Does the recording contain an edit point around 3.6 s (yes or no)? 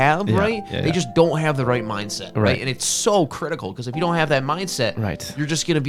no